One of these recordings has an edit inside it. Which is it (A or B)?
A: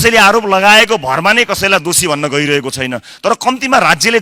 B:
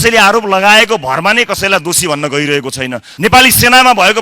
B